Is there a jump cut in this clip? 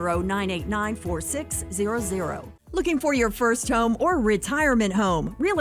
yes; 1 cut; at 2.5 s

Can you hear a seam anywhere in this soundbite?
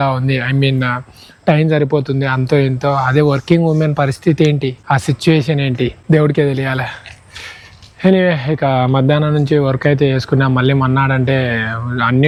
no; 0 cuts

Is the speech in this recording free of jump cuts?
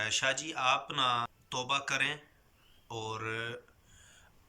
no; 1 cut; at 1.4 s

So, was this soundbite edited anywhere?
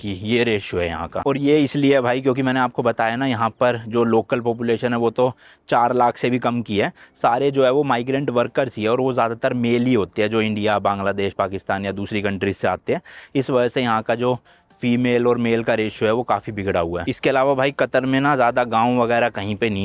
no; 0 cuts

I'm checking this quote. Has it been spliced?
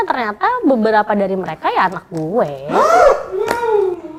no; 0 cuts

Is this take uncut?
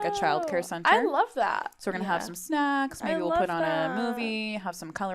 yes; 0 cuts

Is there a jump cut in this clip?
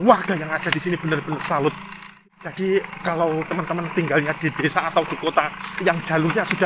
yes; 1 cut; at 2.1 s

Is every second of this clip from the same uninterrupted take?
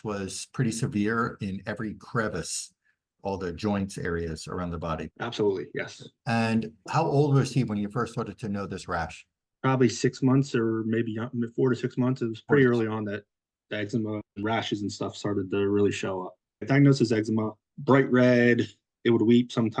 yes; 0 cuts

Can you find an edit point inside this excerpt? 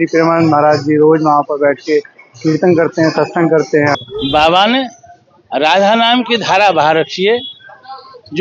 yes; 1 cut; at 4.0 s

